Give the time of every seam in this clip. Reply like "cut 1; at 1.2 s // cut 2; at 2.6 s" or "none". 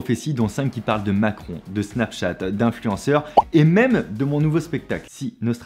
none